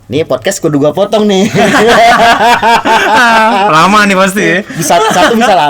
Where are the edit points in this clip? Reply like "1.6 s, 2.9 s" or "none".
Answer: none